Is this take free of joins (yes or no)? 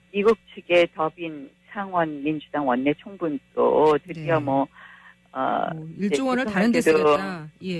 yes